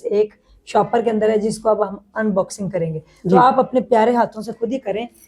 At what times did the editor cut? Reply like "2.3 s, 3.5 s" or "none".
none